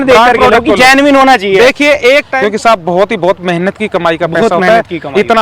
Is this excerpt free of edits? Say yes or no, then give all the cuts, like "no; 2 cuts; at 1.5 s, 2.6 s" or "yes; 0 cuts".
no; 1 cut; at 2.3 s